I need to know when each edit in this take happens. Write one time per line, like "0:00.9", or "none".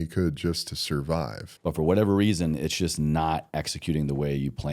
0:01.4

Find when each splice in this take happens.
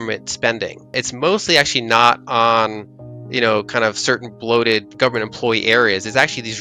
0:01.0
0:04.9

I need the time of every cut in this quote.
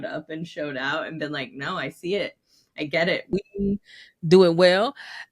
0:03.3

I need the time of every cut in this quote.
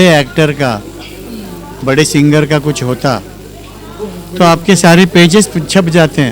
none

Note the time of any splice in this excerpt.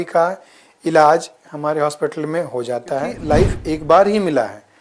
0:03.2

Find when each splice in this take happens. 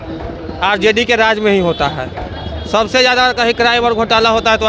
none

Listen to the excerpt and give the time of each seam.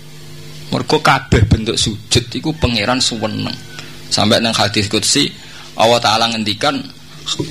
none

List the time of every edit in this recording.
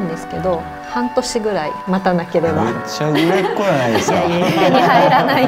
none

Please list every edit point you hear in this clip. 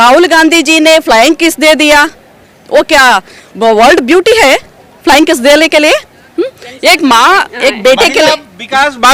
none

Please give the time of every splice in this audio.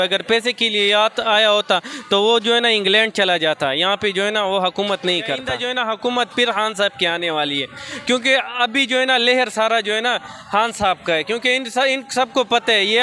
0:05.6

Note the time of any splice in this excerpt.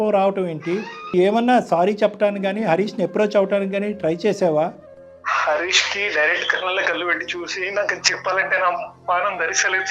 0:01.1

